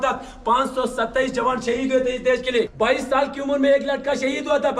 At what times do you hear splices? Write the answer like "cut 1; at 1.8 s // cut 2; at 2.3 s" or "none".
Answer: cut 1; at 2.7 s